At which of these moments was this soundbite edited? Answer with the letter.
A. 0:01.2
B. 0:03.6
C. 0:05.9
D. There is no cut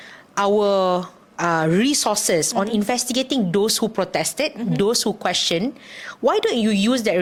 D